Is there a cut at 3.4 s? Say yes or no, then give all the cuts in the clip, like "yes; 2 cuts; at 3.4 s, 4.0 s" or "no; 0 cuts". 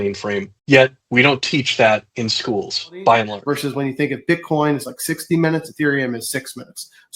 yes; 1 cut; at 3.4 s